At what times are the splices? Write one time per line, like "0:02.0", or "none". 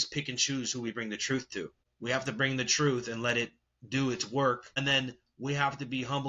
0:01.8
0:04.7